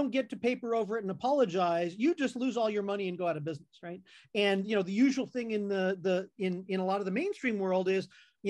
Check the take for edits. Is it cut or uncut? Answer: cut